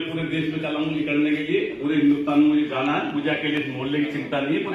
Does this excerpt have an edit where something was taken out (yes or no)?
no